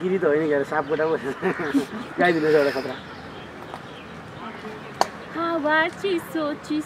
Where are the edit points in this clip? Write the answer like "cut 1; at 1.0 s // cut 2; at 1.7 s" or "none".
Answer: none